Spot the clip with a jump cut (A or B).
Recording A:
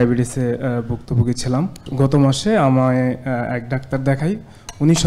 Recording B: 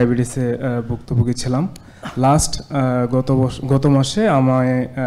A